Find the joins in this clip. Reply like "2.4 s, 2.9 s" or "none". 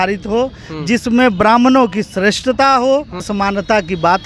3.3 s